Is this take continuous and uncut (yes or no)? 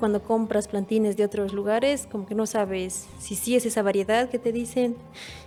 yes